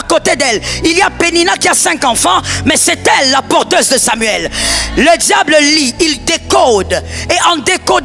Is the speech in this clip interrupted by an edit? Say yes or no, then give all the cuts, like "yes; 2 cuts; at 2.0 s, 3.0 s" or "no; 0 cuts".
no; 0 cuts